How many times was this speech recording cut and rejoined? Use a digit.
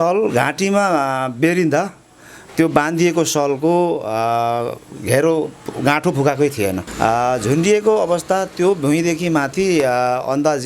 1